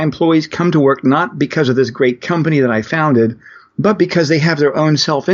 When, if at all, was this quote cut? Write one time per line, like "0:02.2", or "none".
none